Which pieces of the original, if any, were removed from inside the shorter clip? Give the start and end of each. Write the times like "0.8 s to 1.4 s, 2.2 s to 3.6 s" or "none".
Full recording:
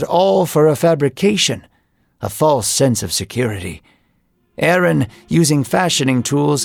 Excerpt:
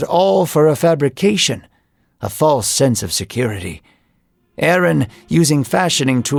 none